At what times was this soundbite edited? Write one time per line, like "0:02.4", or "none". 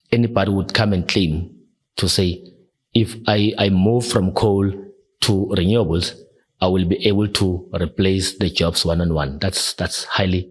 none